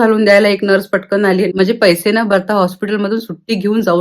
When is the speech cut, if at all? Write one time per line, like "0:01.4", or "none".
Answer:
0:01.5